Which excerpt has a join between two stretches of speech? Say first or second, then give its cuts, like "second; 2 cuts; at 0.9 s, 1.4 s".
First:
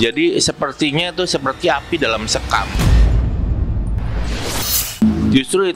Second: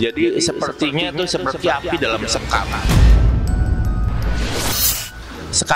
first; 2 cuts; at 2.7 s, 5.0 s